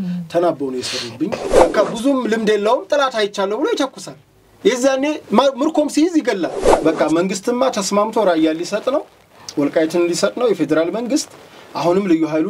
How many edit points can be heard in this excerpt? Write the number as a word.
two